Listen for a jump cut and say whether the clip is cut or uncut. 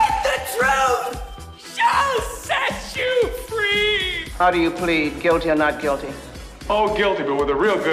uncut